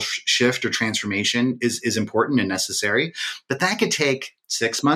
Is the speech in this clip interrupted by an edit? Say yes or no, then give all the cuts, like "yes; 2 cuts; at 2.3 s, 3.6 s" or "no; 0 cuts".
no; 0 cuts